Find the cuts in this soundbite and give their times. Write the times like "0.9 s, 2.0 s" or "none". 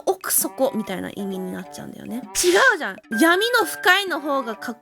3.0 s